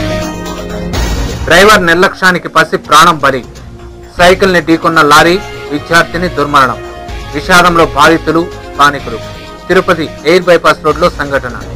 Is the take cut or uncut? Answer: uncut